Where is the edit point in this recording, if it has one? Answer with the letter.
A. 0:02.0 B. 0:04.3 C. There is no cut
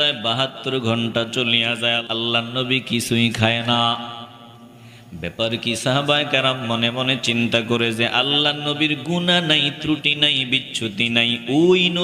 A